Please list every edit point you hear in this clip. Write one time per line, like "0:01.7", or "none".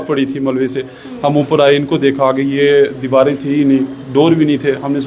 none